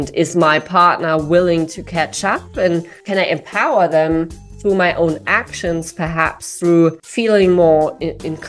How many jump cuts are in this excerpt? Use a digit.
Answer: 2